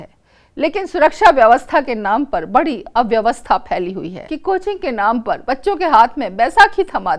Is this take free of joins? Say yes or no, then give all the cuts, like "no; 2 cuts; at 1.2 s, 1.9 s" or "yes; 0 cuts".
no; 1 cut; at 4.2 s